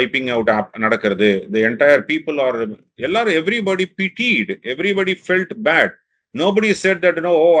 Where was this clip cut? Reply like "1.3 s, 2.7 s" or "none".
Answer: none